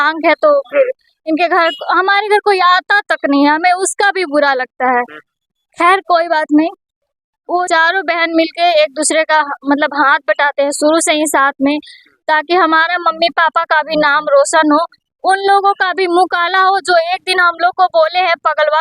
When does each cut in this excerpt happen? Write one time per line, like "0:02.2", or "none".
0:07.6